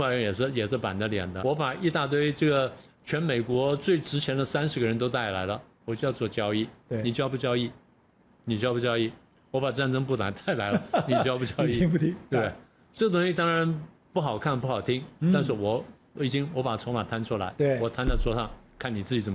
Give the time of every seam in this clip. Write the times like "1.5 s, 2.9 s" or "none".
1.3 s

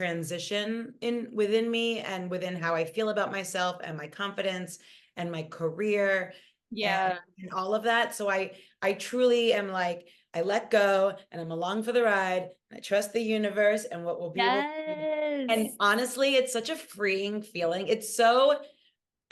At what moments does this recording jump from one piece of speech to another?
none

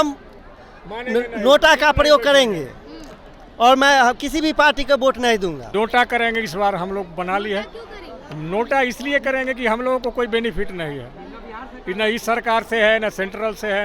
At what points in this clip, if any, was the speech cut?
5.6 s

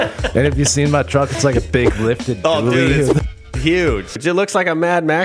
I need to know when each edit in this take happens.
4.2 s

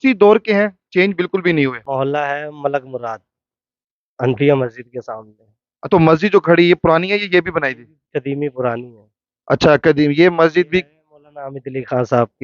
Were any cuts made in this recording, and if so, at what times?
1.8 s

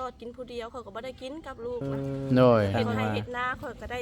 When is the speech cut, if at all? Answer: 2.7 s

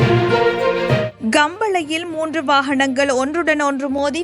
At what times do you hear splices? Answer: 1.1 s

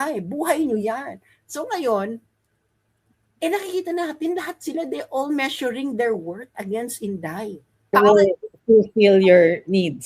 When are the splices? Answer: 7.9 s

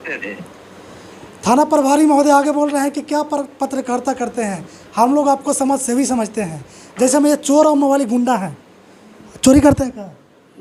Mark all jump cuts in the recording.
none

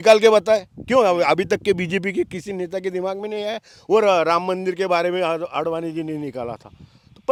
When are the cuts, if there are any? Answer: none

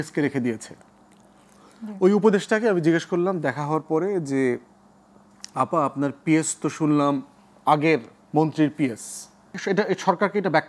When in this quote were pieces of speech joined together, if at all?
9.6 s

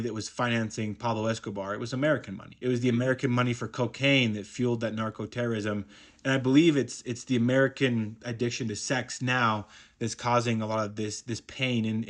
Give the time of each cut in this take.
none

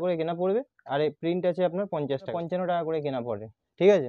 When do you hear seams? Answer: 2.3 s

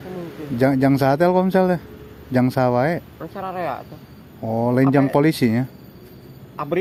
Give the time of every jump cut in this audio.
none

